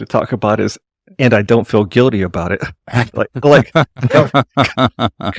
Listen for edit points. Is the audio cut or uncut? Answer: uncut